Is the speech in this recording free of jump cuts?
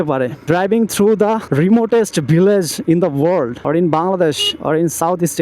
yes; 0 cuts

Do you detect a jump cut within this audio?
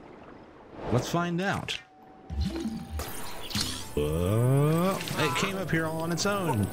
no; 0 cuts

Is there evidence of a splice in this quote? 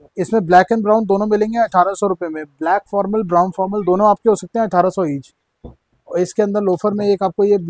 no; 0 cuts

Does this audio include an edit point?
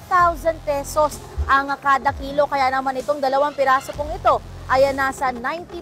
no; 0 cuts

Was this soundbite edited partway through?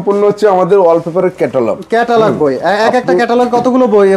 no; 0 cuts

